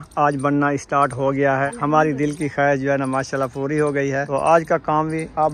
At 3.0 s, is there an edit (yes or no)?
no